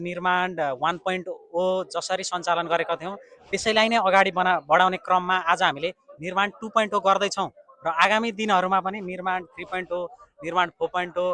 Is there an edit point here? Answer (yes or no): no